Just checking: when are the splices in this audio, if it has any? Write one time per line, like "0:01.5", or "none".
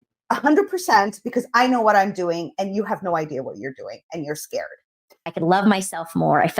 0:05.3